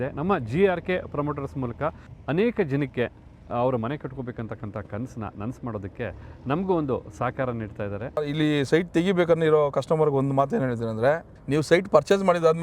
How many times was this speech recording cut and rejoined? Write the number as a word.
three